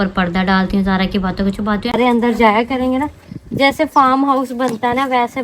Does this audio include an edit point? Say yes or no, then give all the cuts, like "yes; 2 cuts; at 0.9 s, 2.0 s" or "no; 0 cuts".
yes; 1 cut; at 1.9 s